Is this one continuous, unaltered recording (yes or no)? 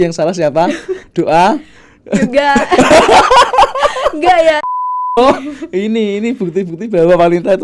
no